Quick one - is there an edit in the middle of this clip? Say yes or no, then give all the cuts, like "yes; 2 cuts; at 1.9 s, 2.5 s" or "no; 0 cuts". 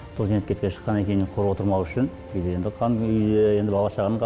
no; 0 cuts